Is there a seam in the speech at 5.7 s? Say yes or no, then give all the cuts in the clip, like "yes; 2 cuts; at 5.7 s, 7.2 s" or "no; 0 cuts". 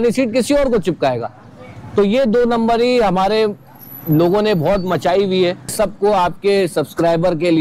yes; 1 cut; at 5.7 s